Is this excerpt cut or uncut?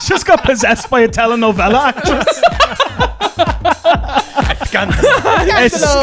cut